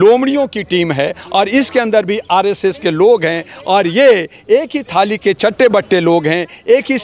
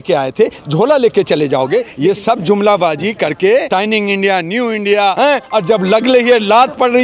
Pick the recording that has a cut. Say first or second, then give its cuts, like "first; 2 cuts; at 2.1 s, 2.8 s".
second; 3 cuts; at 1.9 s, 3.7 s, 5.2 s